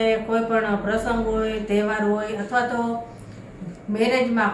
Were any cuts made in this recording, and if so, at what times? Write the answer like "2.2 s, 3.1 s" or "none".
none